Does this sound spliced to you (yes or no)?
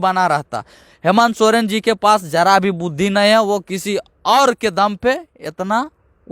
no